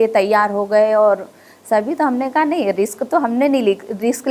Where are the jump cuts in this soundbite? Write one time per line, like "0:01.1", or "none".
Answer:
none